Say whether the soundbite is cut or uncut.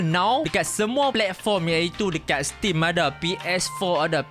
cut